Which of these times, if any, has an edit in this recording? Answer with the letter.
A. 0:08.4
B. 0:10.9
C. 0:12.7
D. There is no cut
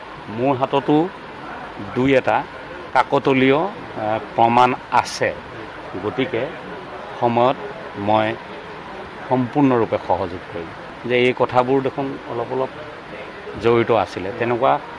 B